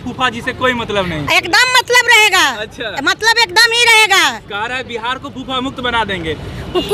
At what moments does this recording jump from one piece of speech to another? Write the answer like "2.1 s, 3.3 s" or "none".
none